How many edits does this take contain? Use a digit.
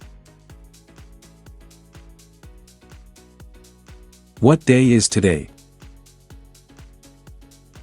4